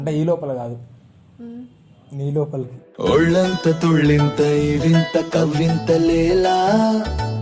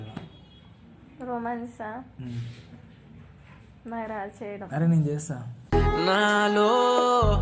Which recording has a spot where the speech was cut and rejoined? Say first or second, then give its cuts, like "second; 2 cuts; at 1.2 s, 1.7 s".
second; 1 cut; at 4.6 s